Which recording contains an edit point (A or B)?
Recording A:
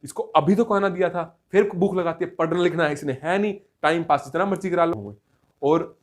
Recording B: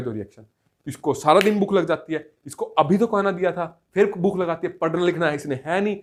A